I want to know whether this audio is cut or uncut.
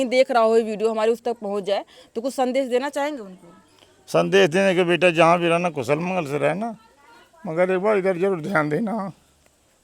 uncut